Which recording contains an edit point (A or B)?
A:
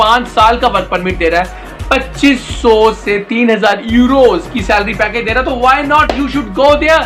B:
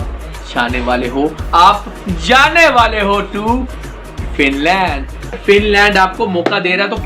B